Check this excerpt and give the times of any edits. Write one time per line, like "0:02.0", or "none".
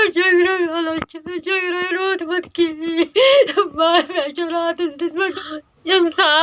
0:05.3